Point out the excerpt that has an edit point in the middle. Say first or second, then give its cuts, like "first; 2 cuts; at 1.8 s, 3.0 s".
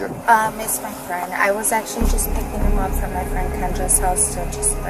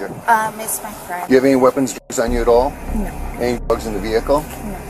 second; 1 cut; at 1.1 s